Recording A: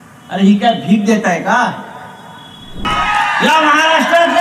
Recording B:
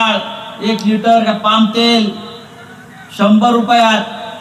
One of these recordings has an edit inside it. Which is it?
A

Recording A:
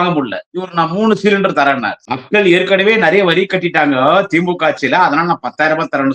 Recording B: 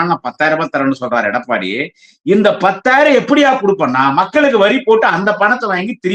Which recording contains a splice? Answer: A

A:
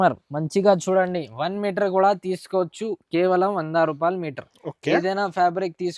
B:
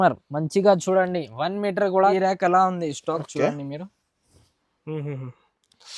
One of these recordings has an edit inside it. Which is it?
B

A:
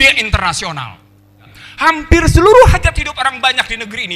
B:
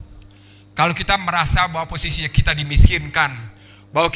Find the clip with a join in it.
A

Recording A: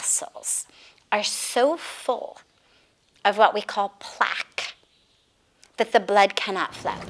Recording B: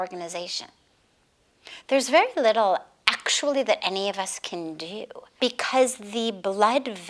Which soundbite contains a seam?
B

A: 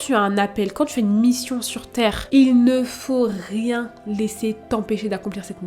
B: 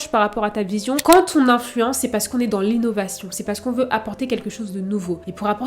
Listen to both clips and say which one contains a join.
B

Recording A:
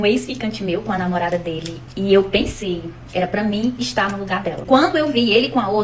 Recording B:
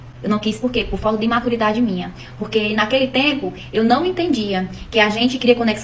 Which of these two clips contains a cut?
A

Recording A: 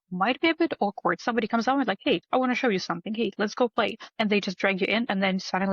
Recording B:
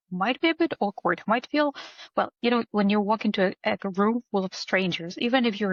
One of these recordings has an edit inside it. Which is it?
A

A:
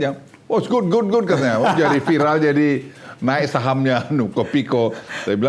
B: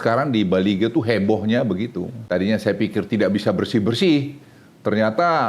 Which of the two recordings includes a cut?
B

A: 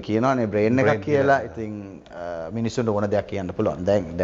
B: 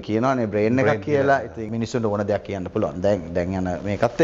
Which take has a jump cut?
B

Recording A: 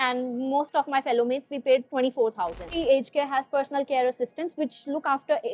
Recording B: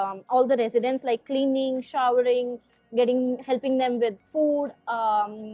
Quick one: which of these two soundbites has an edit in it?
A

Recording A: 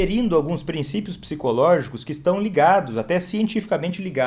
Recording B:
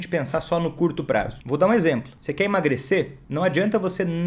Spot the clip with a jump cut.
B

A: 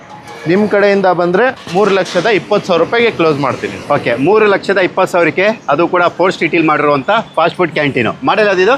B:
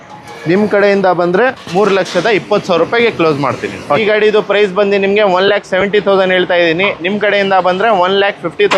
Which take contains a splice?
B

